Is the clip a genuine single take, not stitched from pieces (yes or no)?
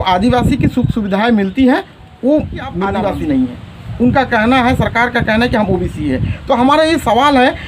no